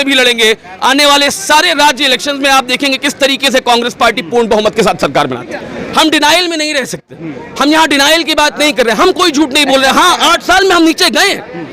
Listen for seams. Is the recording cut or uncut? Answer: cut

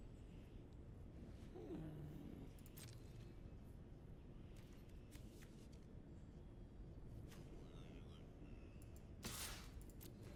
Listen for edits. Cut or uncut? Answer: uncut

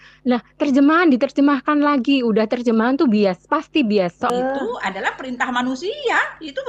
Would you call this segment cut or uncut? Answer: cut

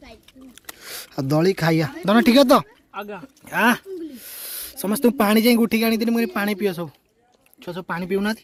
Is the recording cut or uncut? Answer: uncut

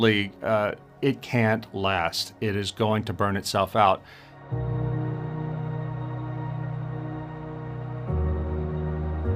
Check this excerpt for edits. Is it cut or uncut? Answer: cut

